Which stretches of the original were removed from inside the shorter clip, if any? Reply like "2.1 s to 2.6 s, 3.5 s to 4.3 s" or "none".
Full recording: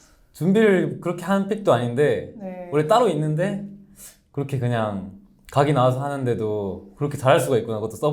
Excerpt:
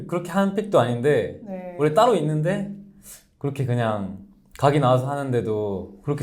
none